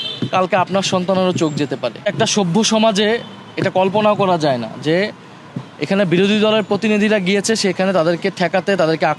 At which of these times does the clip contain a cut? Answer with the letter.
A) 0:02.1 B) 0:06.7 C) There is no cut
A